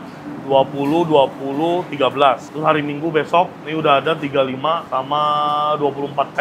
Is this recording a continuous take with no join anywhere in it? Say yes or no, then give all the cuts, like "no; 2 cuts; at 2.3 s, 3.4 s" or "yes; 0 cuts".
no; 2 cuts; at 2.5 s, 4.8 s